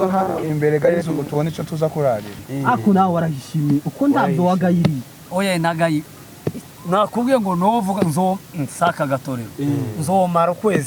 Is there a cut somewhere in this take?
yes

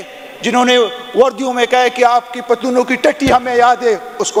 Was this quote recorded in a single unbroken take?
yes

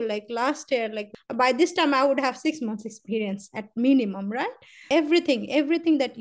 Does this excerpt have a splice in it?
yes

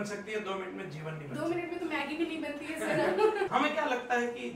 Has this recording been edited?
yes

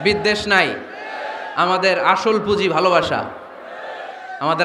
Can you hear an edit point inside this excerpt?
no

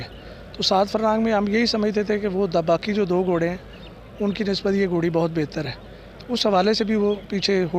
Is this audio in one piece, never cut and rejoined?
yes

